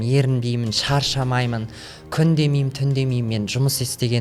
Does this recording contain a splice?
no; 0 cuts

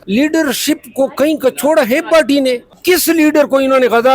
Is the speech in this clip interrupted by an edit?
yes; 1 cut; at 2.7 s

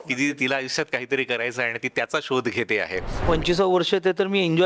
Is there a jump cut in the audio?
yes; 1 cut; at 3.2 s

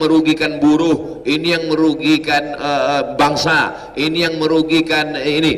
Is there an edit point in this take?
no; 0 cuts

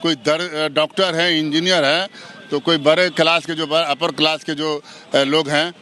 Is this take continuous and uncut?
yes; 0 cuts

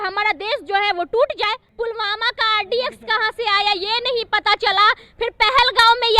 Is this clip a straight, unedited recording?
no; 1 cut; at 1.7 s

